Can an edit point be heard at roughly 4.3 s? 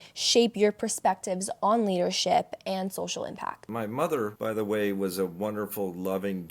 yes; 2 cuts; at 3.7 s, 4.3 s

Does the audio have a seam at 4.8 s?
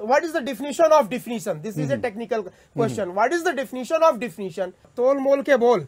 yes; 1 cut; at 4.8 s

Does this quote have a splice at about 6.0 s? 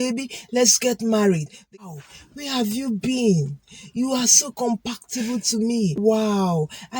yes; 2 cuts; at 1.7 s, 6.0 s

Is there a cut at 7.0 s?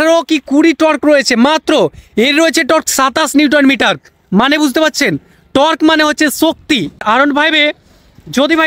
yes; 1 cut; at 7.0 s

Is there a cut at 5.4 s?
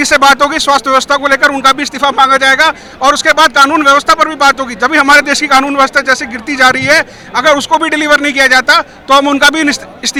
no; 0 cuts

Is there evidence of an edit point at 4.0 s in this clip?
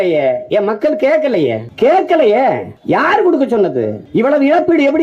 yes; 3 cuts; at 1.7 s, 2.7 s, 4.0 s

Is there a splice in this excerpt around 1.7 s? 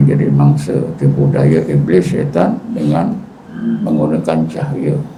no; 0 cuts

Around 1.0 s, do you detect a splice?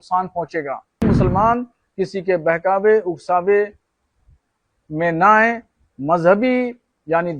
yes; 1 cut; at 1.0 s

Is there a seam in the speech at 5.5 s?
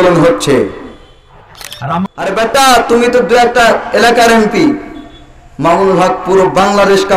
no; 1 cut; at 1.7 s

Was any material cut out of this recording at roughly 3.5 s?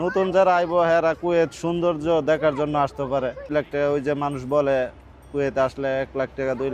yes; 1 cut; at 3.5 s

